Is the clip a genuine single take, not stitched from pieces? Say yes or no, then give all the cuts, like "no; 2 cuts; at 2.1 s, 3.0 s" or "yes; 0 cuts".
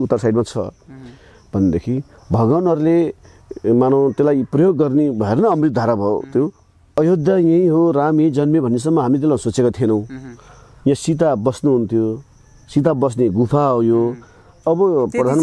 no; 1 cut; at 7.0 s